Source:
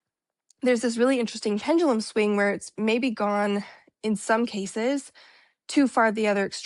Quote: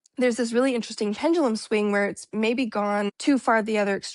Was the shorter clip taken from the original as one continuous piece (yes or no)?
no